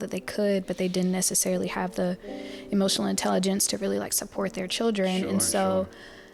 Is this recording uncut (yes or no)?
yes